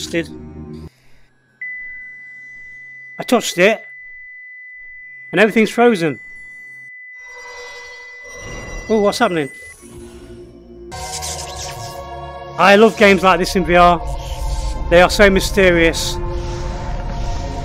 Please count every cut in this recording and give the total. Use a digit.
1